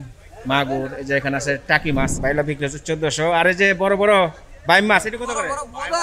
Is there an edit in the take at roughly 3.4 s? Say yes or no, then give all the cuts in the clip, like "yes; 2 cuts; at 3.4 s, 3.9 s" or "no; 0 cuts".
no; 1 cut; at 2.2 s